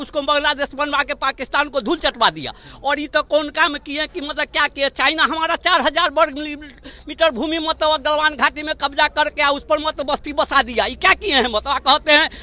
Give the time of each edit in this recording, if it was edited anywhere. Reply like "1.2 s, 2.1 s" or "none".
none